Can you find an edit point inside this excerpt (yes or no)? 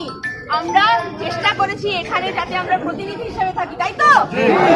no